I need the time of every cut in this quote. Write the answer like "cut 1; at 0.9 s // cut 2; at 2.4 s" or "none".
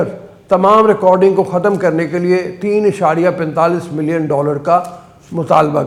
none